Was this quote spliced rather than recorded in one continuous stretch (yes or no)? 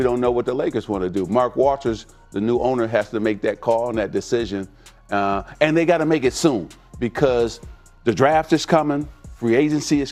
no